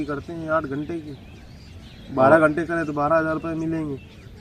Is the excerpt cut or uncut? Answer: uncut